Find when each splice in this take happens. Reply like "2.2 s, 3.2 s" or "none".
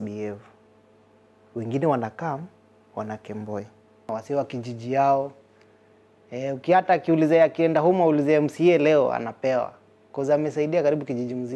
4.1 s